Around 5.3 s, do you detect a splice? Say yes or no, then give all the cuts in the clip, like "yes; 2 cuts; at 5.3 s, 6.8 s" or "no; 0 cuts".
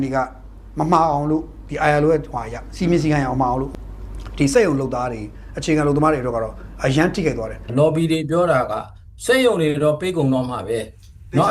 no; 1 cut; at 7.6 s